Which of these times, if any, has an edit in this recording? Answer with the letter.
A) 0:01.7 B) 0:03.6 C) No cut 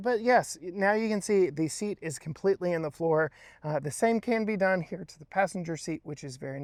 C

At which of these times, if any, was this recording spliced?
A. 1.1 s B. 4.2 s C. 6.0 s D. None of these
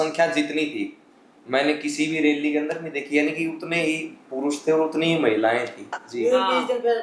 C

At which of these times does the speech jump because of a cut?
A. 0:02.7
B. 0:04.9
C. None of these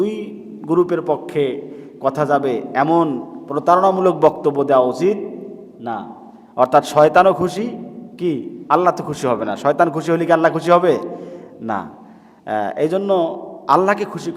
C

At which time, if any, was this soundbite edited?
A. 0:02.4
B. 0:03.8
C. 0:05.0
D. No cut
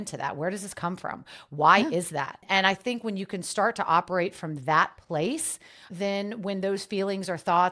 A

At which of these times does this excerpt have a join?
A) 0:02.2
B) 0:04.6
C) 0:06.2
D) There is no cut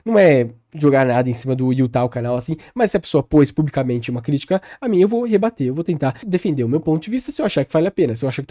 C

